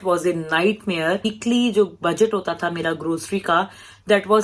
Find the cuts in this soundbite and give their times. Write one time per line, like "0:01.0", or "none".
0:01.3